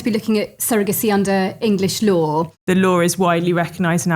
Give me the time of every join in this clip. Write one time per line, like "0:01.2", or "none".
0:02.5